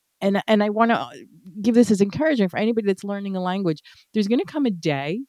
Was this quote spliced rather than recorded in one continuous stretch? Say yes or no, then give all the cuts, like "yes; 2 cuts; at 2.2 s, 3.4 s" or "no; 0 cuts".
no; 0 cuts